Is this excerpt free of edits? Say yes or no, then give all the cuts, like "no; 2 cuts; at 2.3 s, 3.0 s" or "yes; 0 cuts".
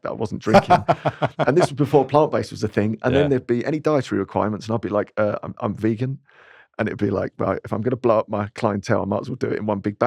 yes; 0 cuts